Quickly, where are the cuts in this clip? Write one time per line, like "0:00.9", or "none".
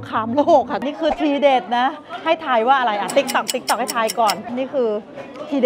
0:00.9
0:04.5